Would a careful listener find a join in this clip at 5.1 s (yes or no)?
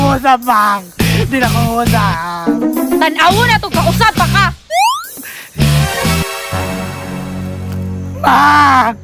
no